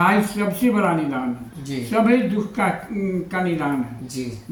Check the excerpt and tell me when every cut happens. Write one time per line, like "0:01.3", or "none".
none